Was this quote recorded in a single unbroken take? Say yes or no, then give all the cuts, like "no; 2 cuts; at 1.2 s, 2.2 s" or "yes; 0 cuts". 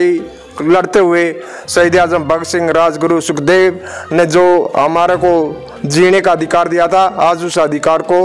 yes; 0 cuts